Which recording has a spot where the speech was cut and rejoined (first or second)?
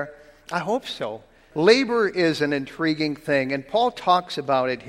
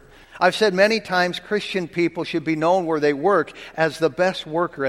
first